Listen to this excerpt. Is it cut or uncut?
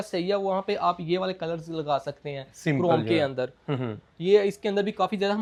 uncut